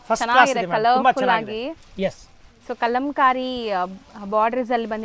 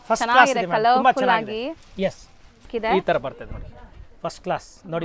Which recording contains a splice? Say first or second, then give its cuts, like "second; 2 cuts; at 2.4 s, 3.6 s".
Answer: second; 1 cut; at 2.7 s